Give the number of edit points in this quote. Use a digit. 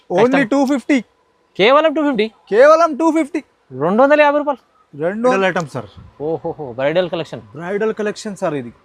1